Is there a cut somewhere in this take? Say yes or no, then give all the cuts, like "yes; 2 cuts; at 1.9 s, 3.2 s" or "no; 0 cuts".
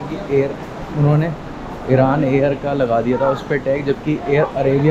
no; 0 cuts